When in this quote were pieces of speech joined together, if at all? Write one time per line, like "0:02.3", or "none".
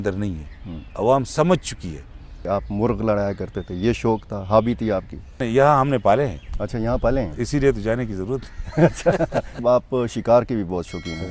0:02.4
0:05.4
0:09.6